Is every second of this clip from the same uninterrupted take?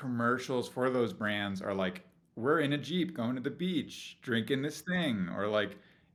yes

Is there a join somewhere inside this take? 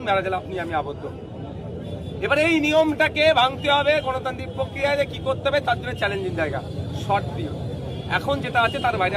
no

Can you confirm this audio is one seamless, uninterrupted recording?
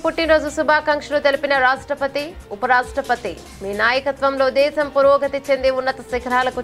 yes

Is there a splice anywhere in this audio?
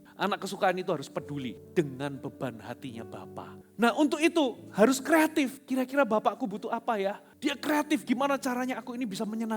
yes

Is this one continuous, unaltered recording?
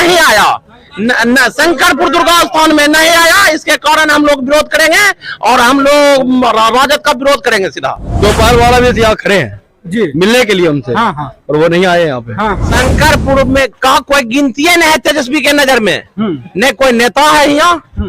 no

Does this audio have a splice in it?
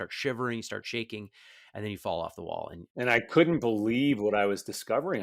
yes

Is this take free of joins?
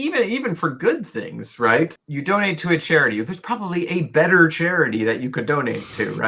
no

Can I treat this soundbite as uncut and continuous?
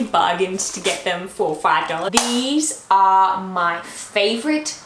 no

